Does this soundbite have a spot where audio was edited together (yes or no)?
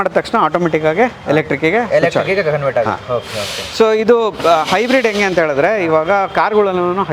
no